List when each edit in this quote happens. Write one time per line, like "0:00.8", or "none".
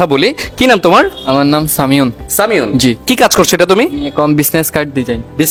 none

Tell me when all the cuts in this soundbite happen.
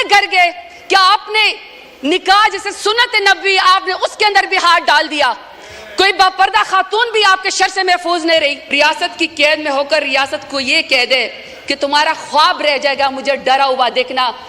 0:08.7

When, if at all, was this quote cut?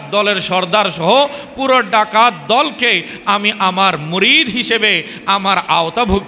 none

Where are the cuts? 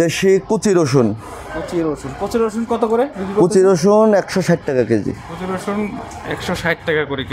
none

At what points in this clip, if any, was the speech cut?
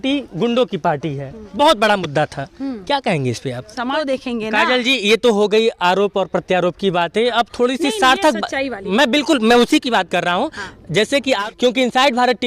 0:03.9
0:11.4

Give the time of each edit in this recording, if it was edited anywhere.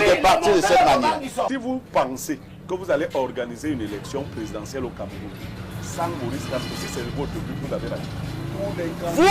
0:01.5

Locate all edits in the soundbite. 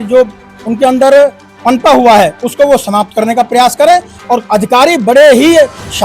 0:04.1

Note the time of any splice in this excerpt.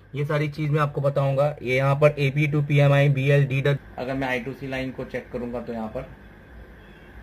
0:03.8

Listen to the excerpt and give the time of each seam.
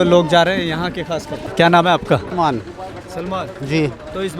0:01.5
0:02.3

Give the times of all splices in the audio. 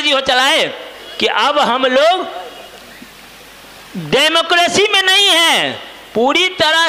0:01.0

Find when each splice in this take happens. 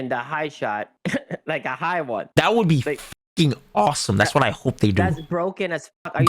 0:00.9
0:02.3

